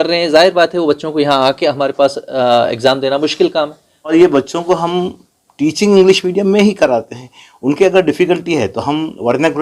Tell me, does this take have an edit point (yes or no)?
yes